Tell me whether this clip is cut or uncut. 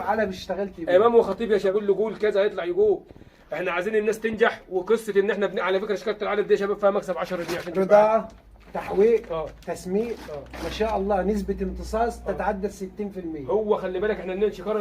cut